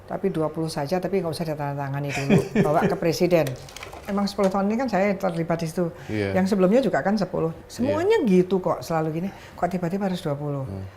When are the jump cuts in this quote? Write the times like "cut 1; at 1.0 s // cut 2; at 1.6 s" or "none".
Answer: cut 1; at 4.0 s